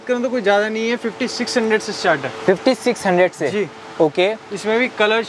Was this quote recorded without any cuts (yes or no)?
yes